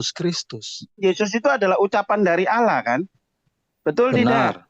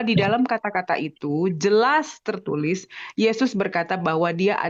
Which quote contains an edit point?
first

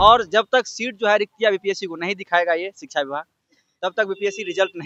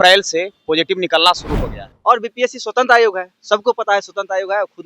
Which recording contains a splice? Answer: second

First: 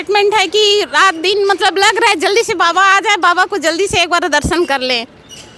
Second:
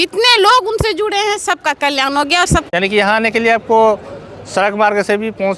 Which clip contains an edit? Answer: second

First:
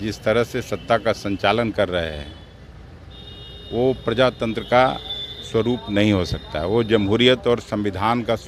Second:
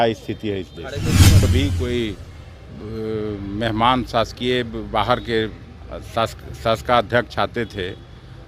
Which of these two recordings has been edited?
second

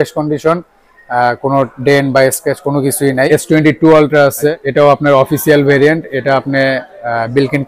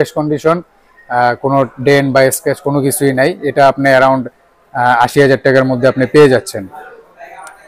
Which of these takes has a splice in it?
first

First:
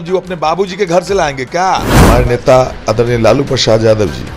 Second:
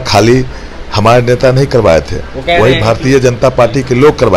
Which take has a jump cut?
first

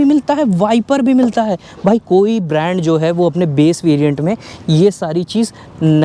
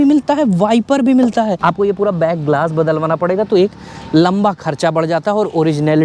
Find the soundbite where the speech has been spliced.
second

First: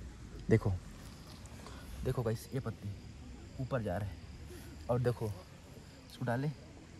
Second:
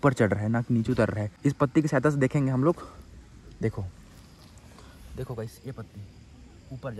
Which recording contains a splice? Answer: second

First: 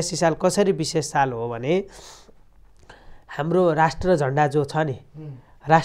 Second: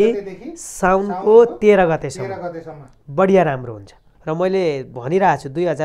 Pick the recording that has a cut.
second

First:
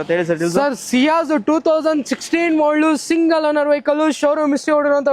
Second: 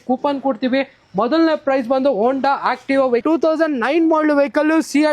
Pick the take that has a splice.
second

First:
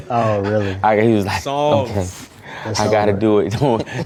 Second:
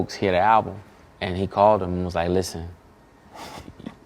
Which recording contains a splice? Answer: second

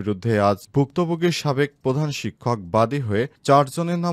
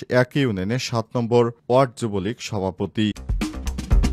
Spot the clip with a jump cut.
second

